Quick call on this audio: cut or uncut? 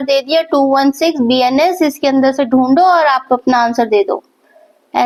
uncut